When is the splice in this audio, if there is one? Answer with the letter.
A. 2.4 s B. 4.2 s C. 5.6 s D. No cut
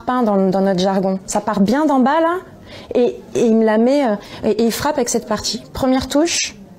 C